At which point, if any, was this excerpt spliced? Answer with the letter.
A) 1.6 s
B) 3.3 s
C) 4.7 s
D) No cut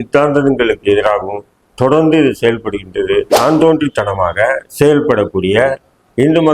B